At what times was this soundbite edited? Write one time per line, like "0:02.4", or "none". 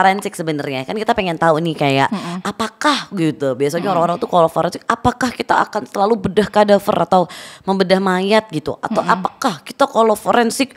none